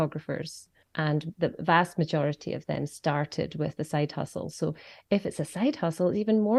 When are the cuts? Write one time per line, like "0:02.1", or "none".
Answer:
none